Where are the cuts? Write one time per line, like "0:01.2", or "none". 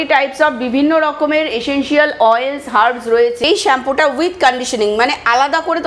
0:03.4